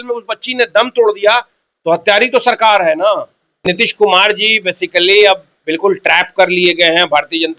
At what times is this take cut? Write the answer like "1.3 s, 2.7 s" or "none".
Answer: 3.6 s